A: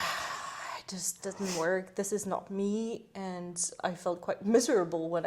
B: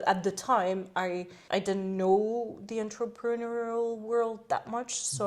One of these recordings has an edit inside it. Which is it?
B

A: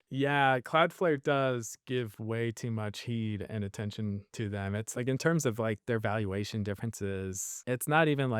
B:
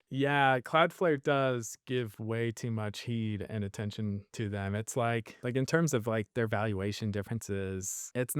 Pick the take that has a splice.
A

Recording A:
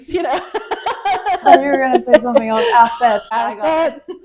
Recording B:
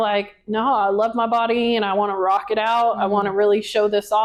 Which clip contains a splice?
A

